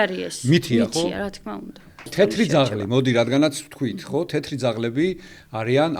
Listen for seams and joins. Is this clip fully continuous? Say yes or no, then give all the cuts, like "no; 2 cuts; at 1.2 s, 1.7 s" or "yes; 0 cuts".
no; 1 cut; at 2.1 s